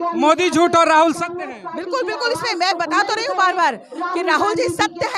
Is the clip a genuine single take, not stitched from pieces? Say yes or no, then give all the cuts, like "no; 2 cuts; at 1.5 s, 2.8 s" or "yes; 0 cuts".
yes; 0 cuts